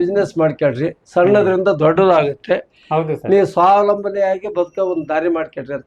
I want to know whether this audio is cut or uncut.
uncut